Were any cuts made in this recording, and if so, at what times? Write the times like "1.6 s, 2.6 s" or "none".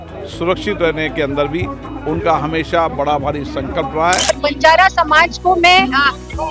4.3 s